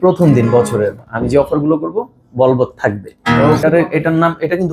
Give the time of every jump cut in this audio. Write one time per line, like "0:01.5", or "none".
0:03.6